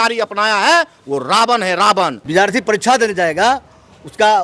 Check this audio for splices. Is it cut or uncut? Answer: cut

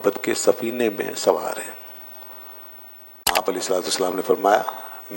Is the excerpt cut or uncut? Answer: cut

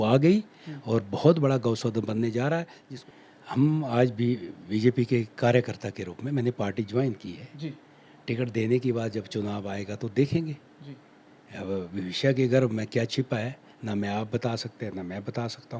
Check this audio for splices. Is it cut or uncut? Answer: cut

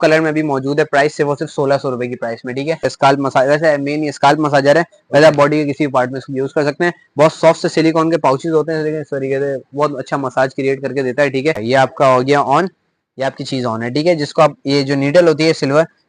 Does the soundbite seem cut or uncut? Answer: cut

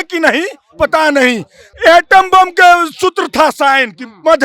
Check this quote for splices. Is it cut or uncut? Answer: cut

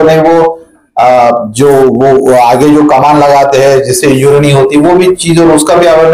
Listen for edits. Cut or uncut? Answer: uncut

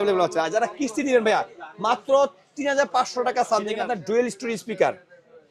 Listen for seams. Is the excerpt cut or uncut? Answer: cut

